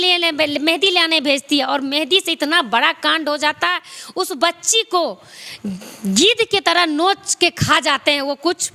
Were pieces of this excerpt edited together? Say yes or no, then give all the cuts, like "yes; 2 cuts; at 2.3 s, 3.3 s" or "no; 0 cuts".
no; 0 cuts